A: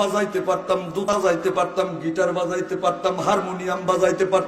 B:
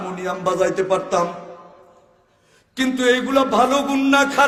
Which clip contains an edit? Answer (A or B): A